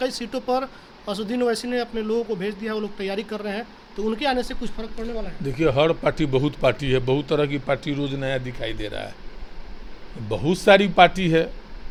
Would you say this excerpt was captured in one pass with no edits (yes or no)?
yes